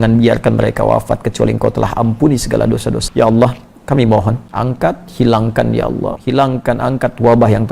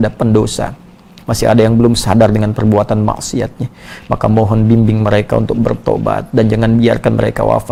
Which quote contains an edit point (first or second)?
first